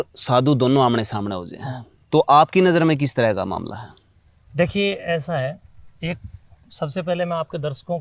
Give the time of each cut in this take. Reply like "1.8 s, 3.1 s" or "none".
none